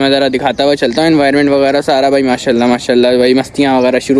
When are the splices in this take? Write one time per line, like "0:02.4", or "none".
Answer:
none